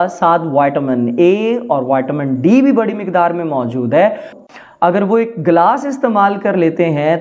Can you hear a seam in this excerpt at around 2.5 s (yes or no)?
no